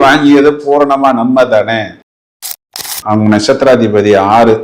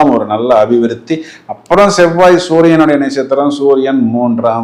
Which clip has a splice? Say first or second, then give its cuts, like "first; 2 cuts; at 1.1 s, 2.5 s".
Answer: first; 1 cut; at 2.3 s